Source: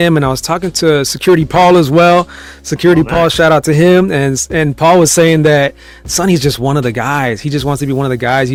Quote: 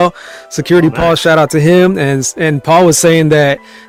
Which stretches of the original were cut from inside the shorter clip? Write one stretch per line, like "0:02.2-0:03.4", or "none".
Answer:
none